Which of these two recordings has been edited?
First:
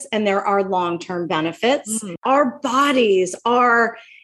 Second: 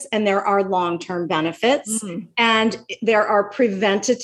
first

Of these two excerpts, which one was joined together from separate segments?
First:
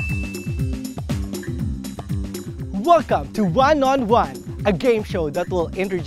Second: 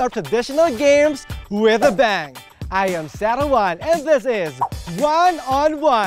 first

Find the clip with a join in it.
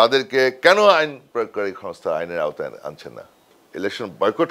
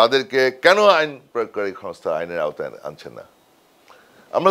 first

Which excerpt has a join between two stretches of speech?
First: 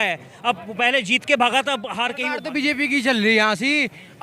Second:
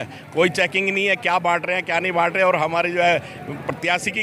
first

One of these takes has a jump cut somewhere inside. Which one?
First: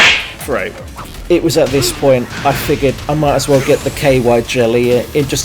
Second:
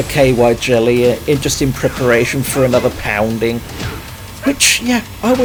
first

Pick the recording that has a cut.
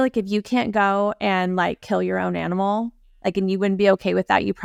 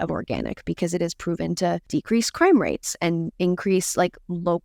second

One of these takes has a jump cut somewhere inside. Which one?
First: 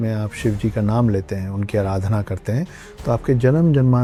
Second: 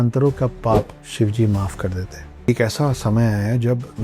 second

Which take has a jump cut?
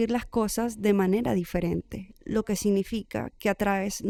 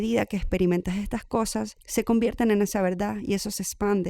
second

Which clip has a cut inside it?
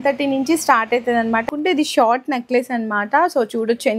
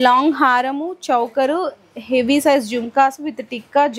first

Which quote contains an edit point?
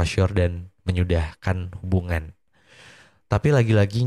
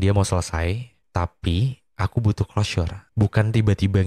second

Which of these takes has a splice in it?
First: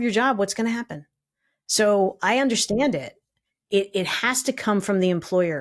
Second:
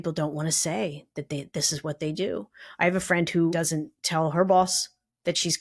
second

